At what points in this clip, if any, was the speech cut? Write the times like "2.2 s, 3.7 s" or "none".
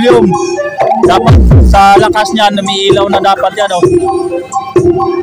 none